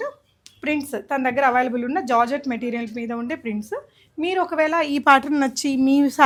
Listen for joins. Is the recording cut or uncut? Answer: uncut